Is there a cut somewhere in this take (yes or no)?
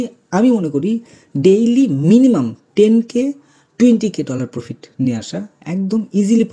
no